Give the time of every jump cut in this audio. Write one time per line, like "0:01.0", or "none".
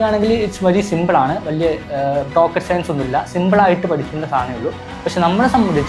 none